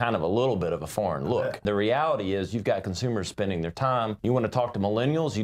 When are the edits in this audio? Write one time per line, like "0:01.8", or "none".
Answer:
0:01.7
0:04.2